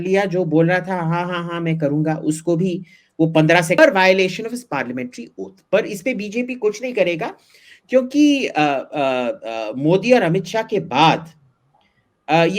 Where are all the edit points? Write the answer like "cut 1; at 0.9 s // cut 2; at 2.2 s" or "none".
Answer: cut 1; at 3.8 s